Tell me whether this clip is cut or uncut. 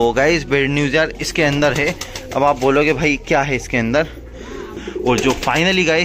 cut